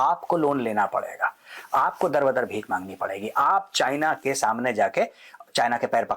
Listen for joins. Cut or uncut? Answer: uncut